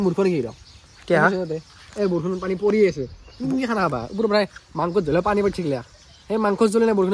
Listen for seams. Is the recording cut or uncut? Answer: uncut